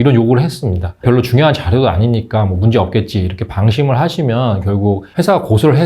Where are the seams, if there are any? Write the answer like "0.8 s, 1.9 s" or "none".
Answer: 1.0 s